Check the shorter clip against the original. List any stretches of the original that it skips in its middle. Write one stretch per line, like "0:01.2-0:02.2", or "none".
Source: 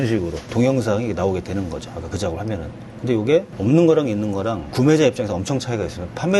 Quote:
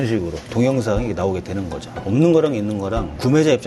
0:02.0-0:03.5